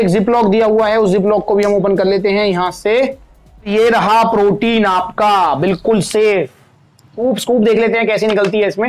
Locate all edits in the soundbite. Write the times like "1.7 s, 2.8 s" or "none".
3.7 s, 7.1 s